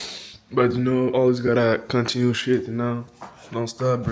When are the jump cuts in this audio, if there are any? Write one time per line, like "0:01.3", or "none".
none